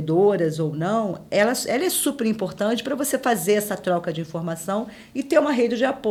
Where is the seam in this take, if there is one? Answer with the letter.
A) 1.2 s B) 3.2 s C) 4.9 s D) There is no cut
D